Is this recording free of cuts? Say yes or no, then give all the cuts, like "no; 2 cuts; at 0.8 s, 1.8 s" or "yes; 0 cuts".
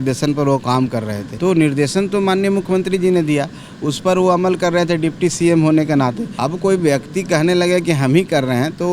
no; 2 cuts; at 1.2 s, 6.3 s